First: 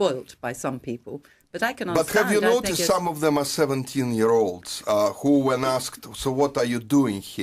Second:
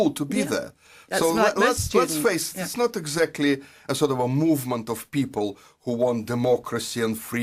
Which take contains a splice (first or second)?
first